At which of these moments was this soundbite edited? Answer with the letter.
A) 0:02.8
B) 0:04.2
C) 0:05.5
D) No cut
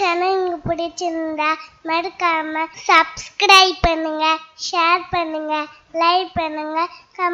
A